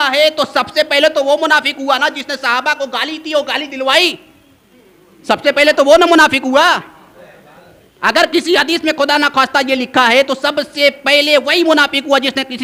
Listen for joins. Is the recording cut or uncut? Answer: uncut